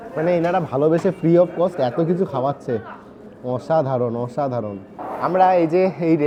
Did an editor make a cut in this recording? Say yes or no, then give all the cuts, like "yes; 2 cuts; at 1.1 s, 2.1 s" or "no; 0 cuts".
no; 0 cuts